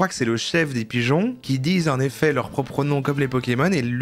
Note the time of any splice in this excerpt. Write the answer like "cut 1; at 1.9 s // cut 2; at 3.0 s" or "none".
none